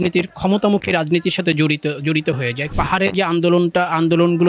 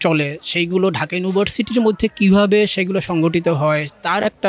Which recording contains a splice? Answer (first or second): first